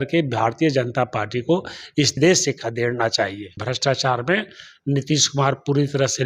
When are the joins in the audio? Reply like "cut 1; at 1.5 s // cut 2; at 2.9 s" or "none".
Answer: cut 1; at 2.1 s // cut 2; at 3.6 s